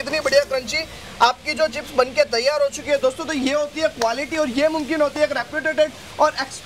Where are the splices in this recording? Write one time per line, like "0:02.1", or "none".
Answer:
none